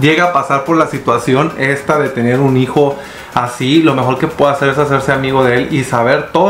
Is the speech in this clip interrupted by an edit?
no; 0 cuts

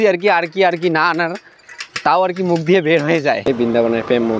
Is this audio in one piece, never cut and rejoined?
no; 1 cut; at 3.5 s

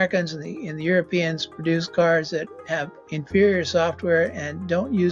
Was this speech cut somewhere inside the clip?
no; 0 cuts

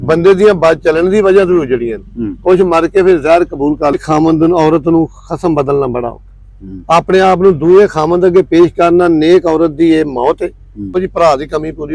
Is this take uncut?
no; 2 cuts; at 4.0 s, 10.9 s

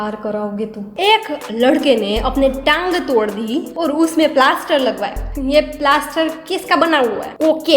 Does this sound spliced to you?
yes; 1 cut; at 5.3 s

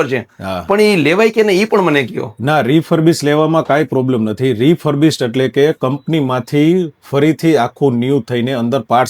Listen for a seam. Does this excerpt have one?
no; 0 cuts

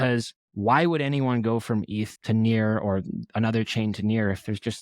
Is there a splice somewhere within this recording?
yes; 1 cut; at 2.2 s

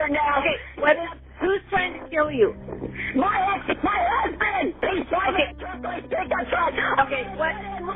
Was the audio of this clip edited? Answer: no; 0 cuts

